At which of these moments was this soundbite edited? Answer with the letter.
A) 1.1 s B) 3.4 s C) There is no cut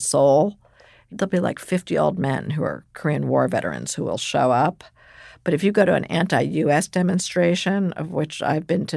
A